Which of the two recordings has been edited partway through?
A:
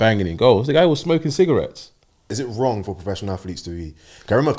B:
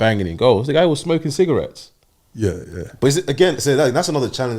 A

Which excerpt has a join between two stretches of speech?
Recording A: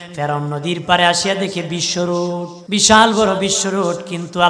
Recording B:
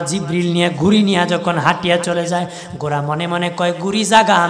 A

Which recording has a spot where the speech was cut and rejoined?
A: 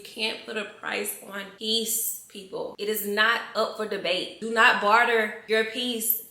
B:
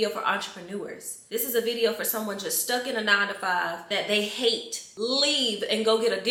A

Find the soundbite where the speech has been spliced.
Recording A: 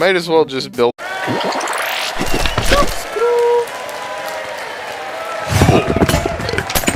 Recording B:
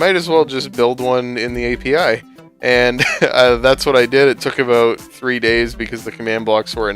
B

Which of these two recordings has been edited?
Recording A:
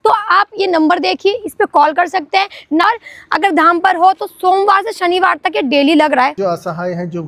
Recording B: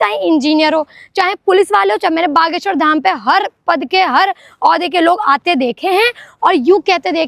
A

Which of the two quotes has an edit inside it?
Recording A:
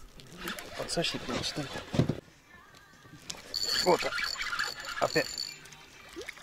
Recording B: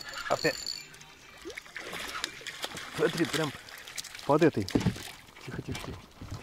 A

